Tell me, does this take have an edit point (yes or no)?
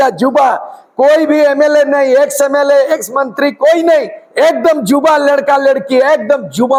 no